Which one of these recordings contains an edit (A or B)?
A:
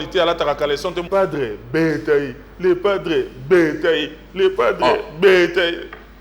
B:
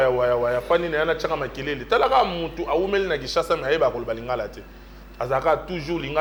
A